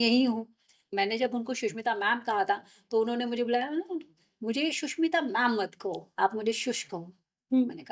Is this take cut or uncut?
cut